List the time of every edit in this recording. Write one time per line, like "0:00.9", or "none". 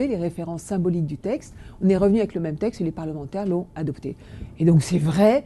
0:01.0

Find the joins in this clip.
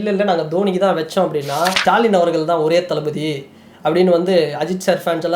0:01.8

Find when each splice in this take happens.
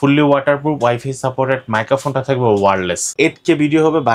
0:03.1

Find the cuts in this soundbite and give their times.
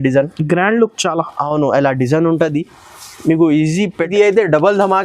0:04.0

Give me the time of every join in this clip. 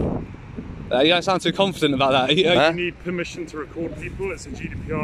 0:02.6

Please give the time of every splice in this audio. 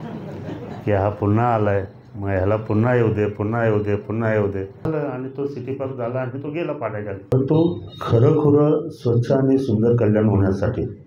0:04.8
0:07.3

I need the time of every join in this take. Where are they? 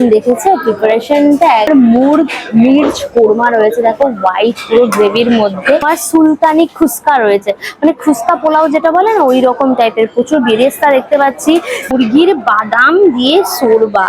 0:01.7
0:05.9
0:11.9

